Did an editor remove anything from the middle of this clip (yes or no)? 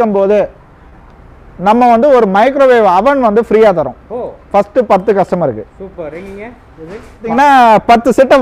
yes